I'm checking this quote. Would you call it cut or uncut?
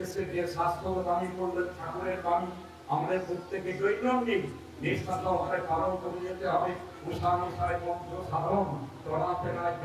uncut